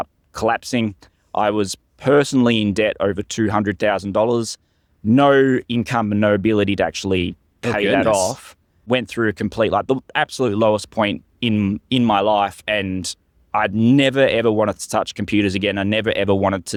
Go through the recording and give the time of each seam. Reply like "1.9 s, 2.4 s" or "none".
none

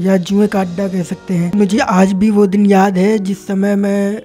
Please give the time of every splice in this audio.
1.5 s

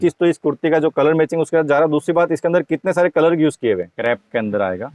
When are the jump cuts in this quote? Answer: 3.9 s

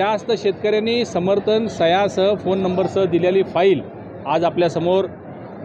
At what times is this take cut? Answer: none

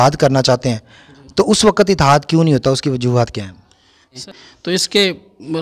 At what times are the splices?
4.2 s

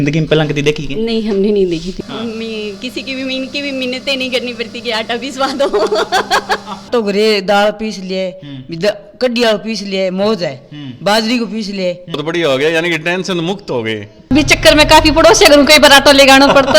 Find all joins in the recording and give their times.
2.0 s, 6.7 s, 12.2 s, 14.3 s

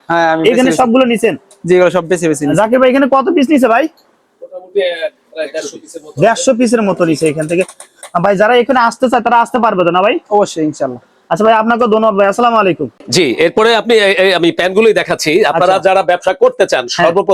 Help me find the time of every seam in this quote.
none

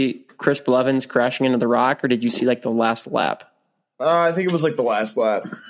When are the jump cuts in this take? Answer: none

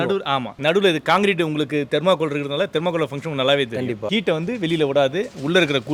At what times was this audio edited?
none

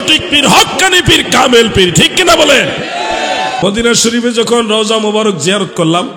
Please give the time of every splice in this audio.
3.6 s

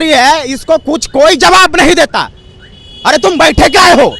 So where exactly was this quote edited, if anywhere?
none

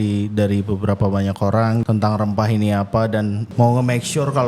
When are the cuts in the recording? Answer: 1.8 s, 3.4 s

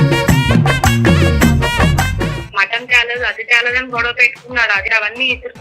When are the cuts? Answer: 2.4 s, 4.9 s

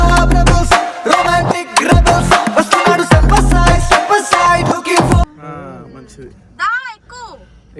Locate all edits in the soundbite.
none

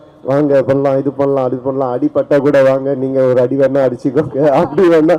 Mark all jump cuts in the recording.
none

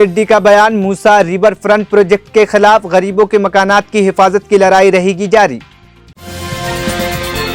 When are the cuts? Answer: none

